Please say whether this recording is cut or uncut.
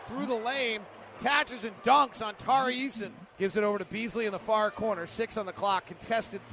cut